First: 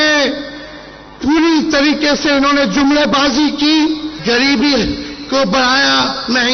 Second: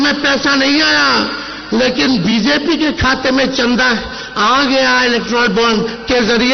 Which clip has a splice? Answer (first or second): first